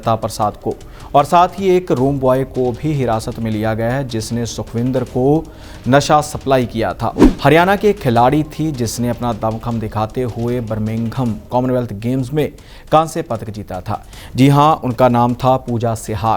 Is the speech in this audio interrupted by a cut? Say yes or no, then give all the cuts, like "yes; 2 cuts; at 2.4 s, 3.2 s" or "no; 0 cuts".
yes; 1 cut; at 7.2 s